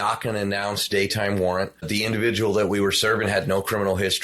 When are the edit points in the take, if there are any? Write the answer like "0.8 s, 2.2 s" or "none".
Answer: 1.9 s